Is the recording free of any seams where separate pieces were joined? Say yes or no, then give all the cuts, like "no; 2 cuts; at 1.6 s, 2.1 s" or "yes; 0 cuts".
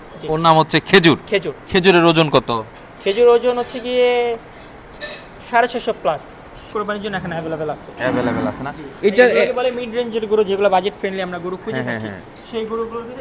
no; 1 cut; at 6.6 s